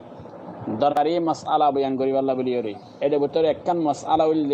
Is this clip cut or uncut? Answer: cut